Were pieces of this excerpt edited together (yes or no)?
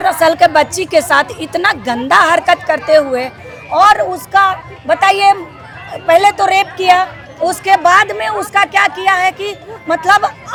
no